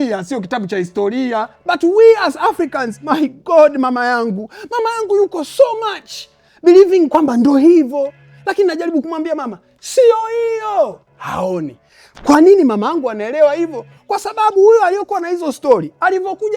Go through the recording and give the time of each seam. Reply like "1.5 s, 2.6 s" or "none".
1.5 s